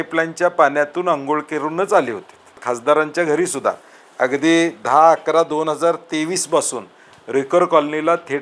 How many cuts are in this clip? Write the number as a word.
one